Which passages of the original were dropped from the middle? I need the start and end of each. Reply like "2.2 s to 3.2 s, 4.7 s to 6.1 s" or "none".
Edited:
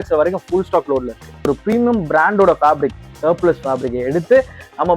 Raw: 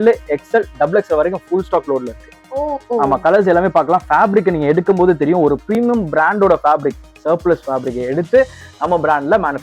2.5 s to 5.5 s